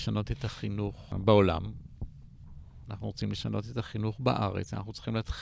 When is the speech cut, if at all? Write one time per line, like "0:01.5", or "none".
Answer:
0:01.1